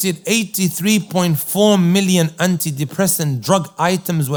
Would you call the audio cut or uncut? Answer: uncut